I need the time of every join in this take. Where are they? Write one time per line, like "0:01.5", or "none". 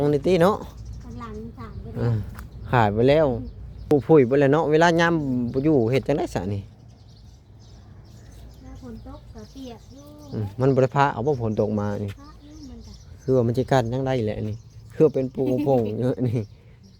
0:03.9